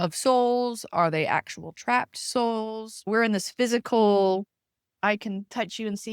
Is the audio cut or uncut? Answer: cut